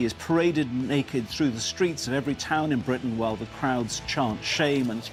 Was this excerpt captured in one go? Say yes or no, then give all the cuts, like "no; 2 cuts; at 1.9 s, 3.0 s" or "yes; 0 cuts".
yes; 0 cuts